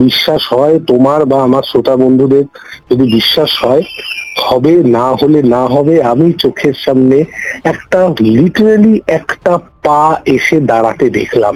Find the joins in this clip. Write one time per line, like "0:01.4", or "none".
none